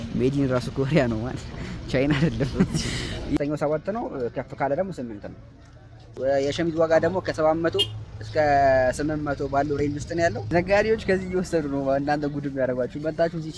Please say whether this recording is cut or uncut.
cut